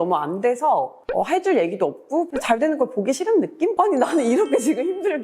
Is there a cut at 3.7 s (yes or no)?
yes